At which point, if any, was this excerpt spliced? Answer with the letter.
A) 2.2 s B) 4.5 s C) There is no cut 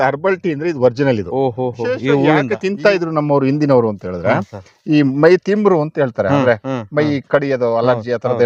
A